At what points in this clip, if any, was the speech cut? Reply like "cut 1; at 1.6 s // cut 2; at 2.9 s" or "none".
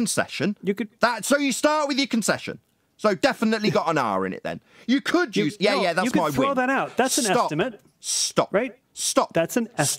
none

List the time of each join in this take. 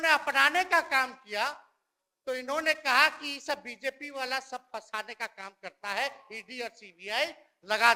none

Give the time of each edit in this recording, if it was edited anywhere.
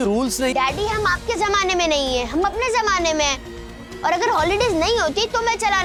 none

